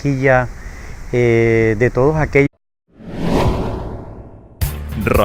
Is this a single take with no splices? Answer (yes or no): yes